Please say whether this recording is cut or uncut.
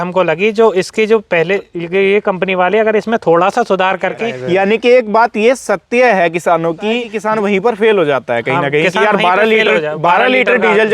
cut